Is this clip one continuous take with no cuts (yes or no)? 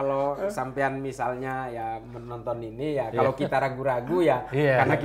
yes